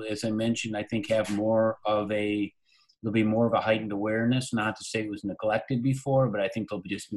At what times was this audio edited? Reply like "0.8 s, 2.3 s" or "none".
none